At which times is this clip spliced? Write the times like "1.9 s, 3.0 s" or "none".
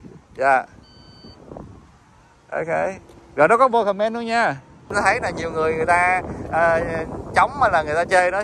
4.9 s